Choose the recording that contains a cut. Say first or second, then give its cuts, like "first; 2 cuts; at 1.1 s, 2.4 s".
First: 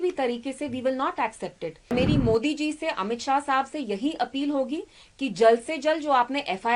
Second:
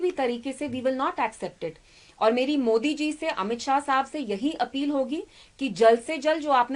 first; 1 cut; at 1.9 s